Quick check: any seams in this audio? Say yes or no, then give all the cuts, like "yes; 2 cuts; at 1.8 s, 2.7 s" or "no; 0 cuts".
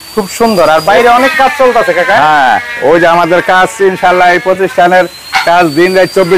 no; 0 cuts